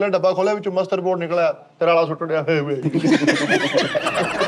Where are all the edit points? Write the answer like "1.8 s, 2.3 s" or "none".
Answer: none